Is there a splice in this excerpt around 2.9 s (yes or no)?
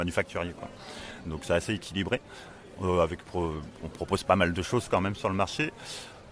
no